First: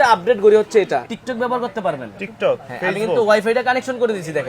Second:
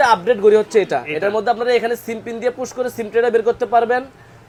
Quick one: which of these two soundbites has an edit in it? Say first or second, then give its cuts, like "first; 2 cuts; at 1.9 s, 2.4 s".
first; 1 cut; at 1.1 s